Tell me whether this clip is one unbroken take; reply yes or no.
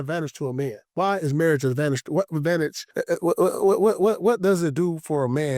no